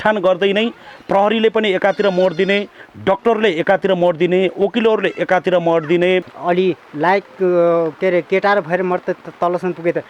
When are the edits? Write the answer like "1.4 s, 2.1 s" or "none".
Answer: 6.3 s